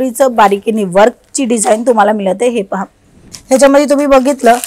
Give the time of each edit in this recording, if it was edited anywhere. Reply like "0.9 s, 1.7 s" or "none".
3.2 s